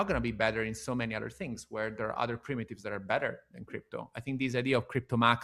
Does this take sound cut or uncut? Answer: uncut